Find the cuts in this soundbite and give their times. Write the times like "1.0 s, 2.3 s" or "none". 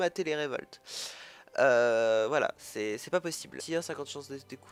none